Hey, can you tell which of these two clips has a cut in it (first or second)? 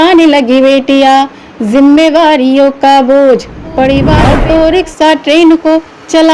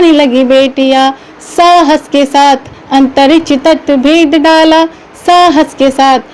first